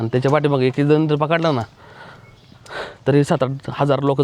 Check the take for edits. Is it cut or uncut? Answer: uncut